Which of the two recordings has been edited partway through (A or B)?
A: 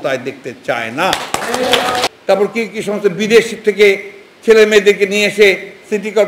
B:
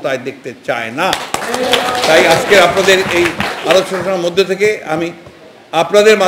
A